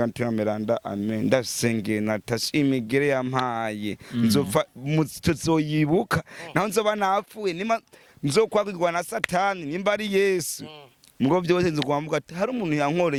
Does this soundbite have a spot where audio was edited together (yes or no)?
no